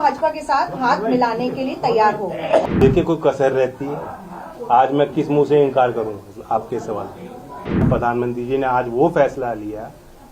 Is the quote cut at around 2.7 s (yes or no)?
yes